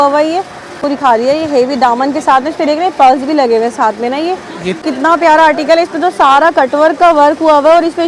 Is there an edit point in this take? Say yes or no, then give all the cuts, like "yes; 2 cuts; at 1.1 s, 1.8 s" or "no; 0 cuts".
yes; 2 cuts; at 0.8 s, 4.8 s